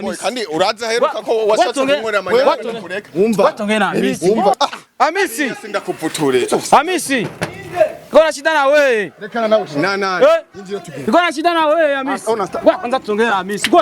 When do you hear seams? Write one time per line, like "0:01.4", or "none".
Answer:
0:04.5